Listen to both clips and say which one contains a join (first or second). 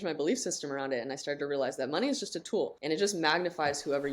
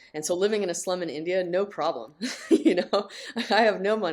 first